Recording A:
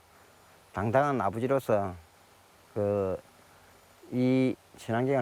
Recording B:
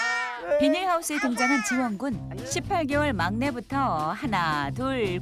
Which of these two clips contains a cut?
B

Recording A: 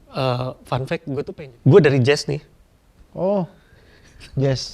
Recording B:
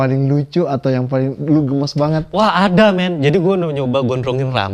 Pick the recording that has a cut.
A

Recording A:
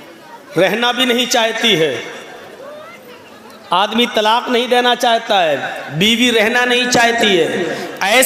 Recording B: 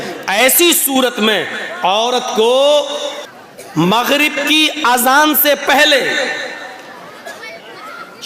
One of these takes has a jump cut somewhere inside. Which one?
B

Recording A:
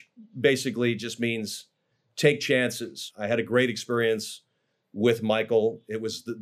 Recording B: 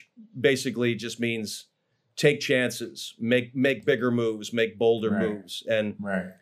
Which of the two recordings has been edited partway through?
A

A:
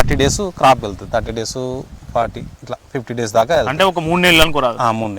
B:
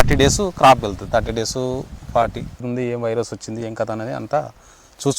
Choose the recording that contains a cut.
B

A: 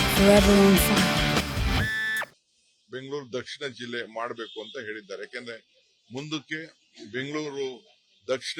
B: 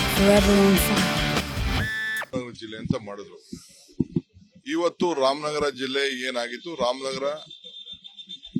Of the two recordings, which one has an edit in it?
B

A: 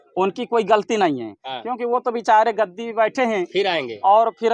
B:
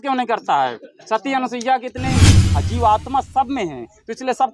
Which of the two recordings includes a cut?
B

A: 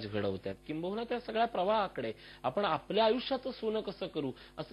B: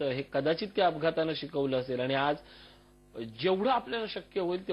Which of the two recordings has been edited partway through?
A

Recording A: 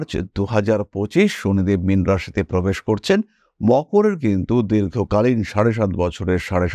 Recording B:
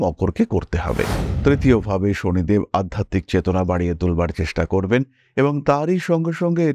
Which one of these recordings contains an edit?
B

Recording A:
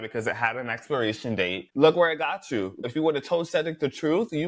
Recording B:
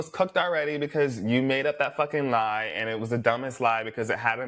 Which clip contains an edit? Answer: A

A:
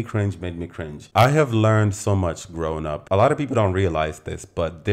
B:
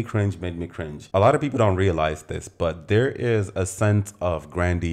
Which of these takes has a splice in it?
B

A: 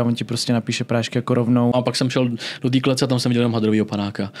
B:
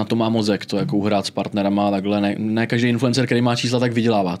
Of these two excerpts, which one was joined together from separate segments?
A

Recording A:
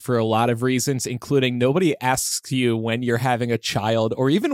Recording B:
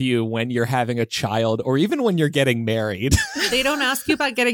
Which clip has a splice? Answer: B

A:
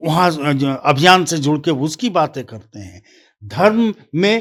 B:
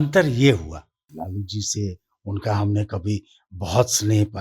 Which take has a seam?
B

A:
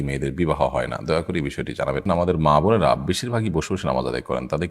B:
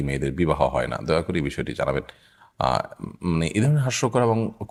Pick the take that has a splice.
A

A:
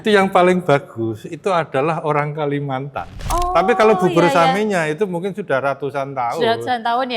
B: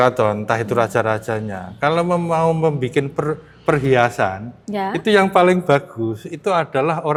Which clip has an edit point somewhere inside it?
A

